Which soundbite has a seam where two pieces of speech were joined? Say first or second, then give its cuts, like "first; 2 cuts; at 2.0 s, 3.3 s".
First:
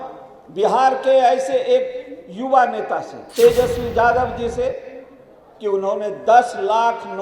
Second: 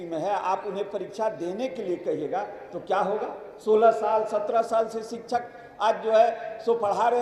first; 1 cut; at 3.2 s